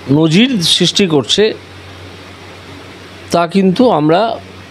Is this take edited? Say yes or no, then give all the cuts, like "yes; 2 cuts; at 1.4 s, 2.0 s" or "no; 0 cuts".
no; 0 cuts